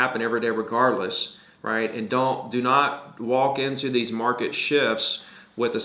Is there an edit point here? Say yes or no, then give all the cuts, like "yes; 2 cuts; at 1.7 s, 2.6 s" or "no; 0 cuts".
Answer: no; 0 cuts